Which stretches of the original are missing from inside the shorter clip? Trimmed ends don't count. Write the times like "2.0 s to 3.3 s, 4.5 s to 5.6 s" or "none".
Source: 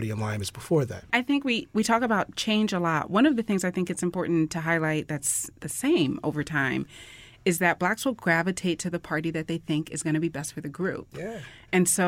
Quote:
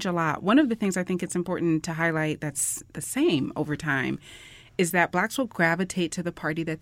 none

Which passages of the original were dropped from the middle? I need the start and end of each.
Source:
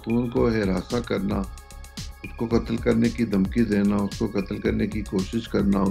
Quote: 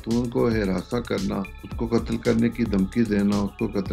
1.6 s to 2.2 s

